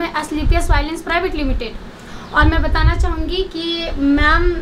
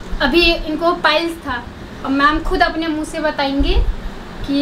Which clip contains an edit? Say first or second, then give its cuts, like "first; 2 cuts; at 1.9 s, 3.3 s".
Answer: second; 1 cut; at 2.0 s